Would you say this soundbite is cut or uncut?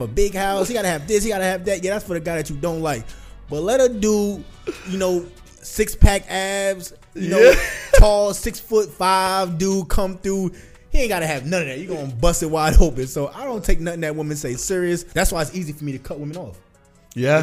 cut